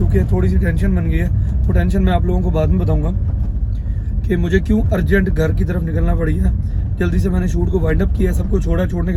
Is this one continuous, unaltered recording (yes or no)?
yes